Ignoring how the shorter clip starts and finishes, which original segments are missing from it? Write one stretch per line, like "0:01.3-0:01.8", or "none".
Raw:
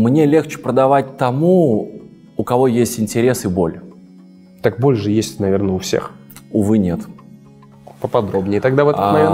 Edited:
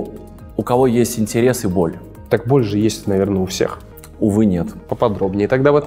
0:03.9-0:04.4
0:07.1-0:07.9